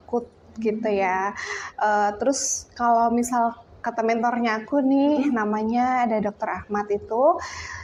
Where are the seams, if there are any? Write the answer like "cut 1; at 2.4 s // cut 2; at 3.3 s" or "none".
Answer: none